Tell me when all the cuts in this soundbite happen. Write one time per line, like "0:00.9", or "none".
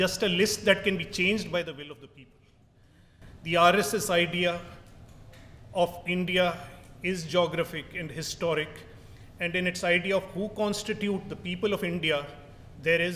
0:11.0